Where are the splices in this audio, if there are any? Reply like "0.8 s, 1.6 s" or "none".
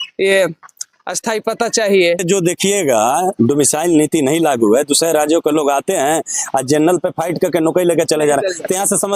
none